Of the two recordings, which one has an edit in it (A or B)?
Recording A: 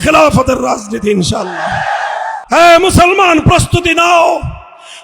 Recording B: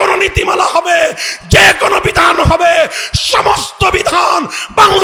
A